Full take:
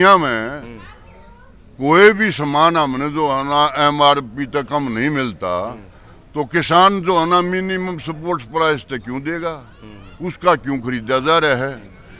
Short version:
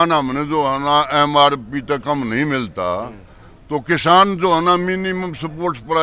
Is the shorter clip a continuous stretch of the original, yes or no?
yes